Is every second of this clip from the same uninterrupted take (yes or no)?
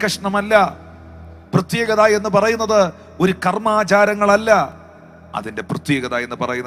yes